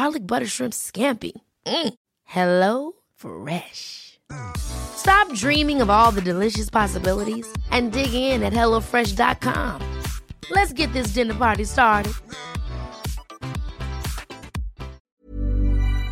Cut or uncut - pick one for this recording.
cut